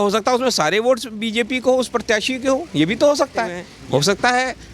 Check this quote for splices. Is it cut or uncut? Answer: cut